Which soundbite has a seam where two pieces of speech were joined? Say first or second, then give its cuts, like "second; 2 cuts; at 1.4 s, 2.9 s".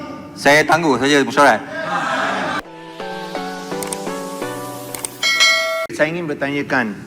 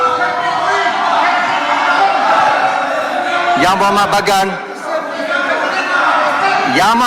first; 1 cut; at 2.5 s